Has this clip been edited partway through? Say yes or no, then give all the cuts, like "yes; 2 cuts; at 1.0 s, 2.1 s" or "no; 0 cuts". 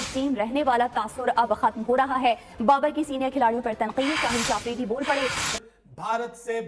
yes; 1 cut; at 5.5 s